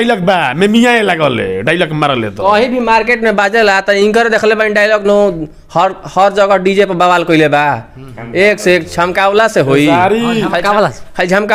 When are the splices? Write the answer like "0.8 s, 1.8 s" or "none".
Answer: none